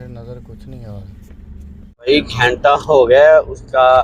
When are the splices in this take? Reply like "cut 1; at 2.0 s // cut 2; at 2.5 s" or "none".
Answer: cut 1; at 2.1 s